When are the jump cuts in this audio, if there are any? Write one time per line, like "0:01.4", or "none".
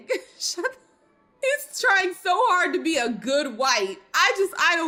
none